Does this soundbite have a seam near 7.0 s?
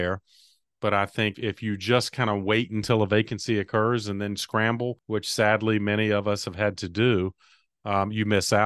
no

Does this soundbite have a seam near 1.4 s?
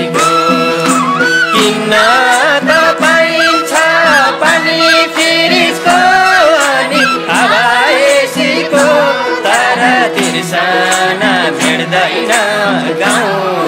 no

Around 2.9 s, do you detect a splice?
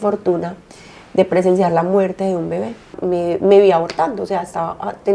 yes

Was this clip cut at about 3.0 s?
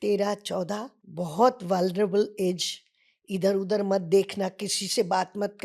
no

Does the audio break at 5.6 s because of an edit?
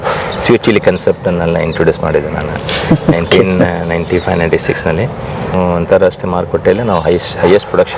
yes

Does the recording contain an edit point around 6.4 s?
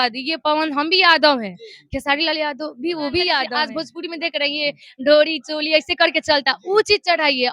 no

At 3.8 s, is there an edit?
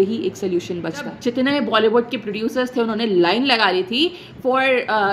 no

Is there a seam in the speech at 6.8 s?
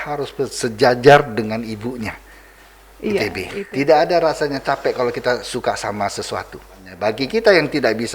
yes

